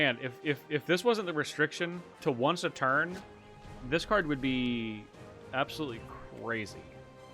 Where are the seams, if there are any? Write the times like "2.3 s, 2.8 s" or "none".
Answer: 2.1 s